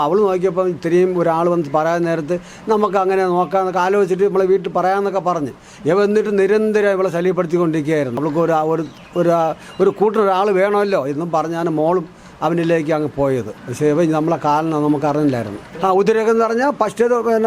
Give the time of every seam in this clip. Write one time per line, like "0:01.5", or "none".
0:08.2
0:15.6

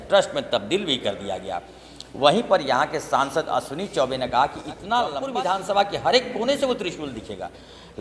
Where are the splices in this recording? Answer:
0:05.2

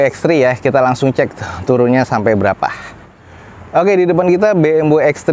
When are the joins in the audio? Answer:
none

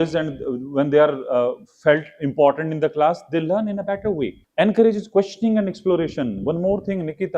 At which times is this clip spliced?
0:04.4

